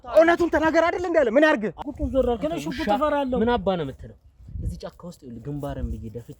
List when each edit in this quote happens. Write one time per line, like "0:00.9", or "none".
0:01.8

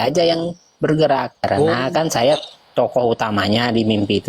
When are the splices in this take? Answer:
0:01.3

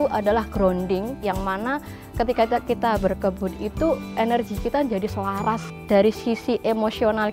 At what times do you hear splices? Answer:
0:01.2
0:05.7

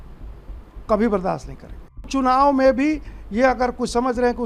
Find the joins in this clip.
0:02.1

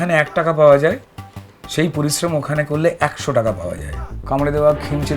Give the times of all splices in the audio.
0:04.2

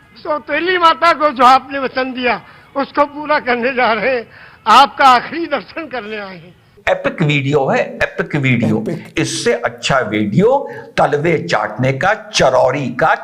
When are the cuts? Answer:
0:06.5

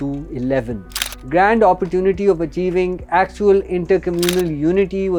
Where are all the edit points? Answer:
none

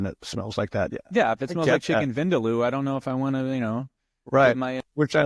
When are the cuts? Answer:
none

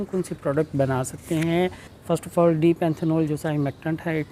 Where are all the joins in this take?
none

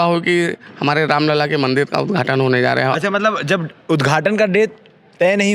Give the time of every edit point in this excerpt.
none

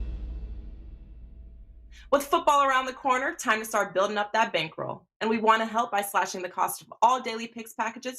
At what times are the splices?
0:01.9

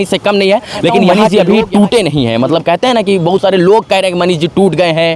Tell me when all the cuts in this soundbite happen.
0:01.1

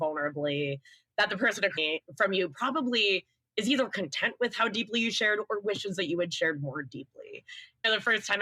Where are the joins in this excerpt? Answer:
none

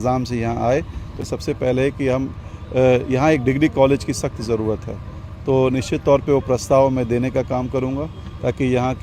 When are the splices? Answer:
0:01.2

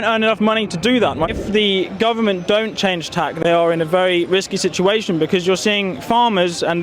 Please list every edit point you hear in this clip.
0:01.0

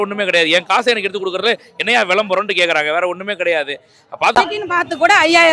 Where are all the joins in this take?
0:04.4

